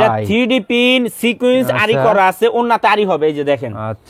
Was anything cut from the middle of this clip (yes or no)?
no